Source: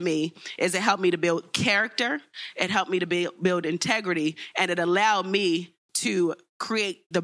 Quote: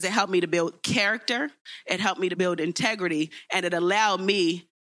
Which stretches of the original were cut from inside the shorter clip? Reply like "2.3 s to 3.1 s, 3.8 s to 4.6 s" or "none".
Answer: 3.0 s to 3.4 s